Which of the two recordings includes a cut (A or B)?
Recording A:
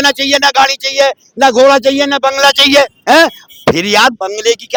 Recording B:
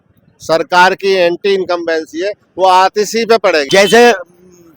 B